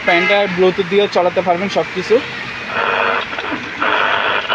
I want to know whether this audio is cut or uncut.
uncut